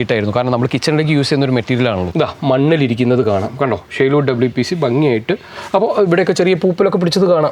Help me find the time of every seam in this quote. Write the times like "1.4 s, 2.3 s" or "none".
2.1 s